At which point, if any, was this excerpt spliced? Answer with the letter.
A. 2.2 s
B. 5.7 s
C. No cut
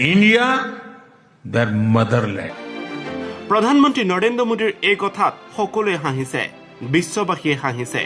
A